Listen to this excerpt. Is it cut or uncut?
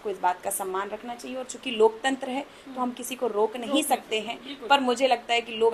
uncut